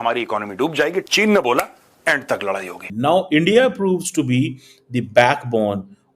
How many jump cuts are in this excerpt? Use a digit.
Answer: 1